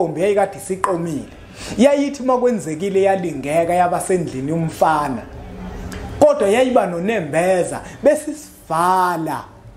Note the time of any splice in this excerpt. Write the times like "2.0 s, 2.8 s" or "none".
none